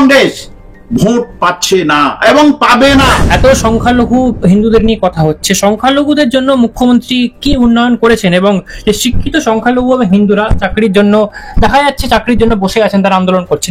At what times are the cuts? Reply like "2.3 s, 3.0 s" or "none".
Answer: 3.2 s